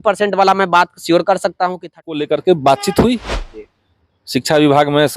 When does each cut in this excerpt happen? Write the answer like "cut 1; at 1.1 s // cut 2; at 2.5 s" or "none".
cut 1; at 2.1 s